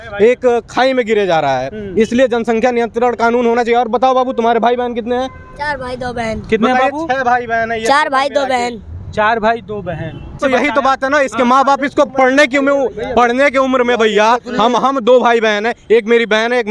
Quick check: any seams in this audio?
no; 0 cuts

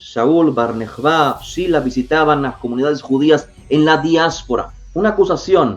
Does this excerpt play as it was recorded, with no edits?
no; 1 cut; at 4.8 s

